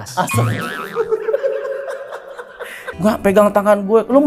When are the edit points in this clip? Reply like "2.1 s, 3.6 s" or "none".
2.8 s